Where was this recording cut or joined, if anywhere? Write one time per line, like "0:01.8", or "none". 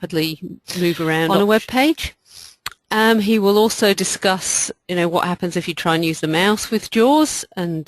0:01.3